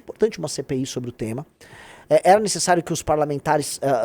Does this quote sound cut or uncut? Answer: uncut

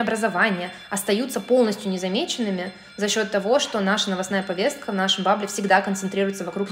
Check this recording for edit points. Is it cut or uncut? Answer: uncut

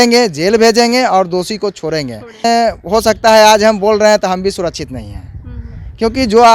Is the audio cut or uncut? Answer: cut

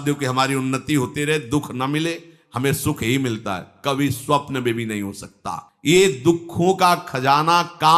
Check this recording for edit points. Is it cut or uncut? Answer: uncut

